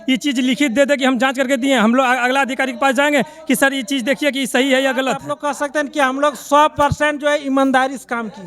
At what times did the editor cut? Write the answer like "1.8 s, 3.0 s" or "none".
5.3 s